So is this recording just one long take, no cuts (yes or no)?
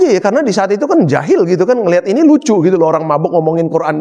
yes